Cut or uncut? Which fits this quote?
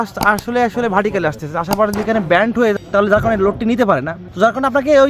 cut